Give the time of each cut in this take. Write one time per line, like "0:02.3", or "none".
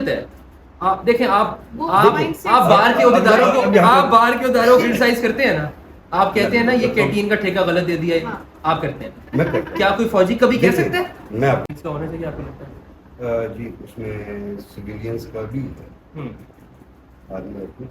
0:11.7